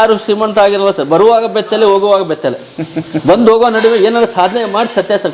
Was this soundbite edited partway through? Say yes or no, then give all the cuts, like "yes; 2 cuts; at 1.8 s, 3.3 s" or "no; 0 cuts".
no; 0 cuts